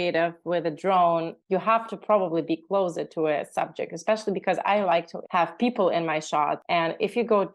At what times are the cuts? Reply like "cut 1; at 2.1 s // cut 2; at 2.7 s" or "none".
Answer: cut 1; at 1.4 s // cut 2; at 5.2 s // cut 3; at 6.6 s